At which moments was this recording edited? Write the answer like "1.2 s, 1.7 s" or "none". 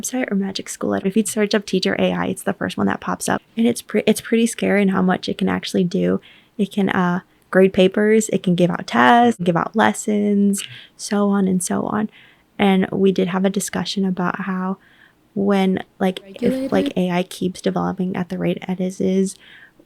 1.0 s, 3.4 s, 9.4 s

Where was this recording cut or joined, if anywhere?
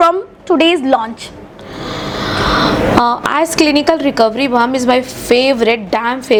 none

